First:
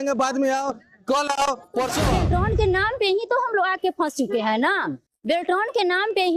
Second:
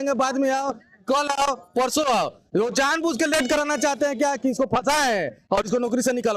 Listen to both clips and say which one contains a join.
first; 1 cut; at 2.1 s

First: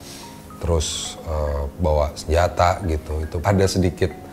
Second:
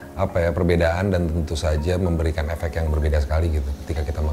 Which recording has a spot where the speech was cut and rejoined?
first; 1 cut; at 3.4 s

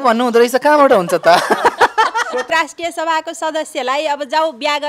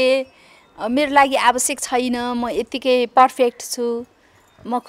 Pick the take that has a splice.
first; 1 cut; at 2.5 s

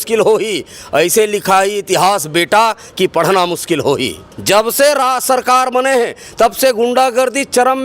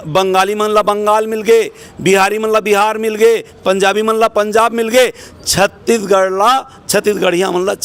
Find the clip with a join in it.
first; 1 cut; at 4.3 s

